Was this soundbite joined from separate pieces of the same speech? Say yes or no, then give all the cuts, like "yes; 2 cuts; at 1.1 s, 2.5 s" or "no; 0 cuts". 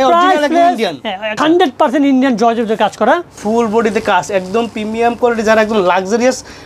yes; 2 cuts; at 1.4 s, 3.4 s